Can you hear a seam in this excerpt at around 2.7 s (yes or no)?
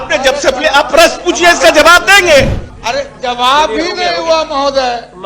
yes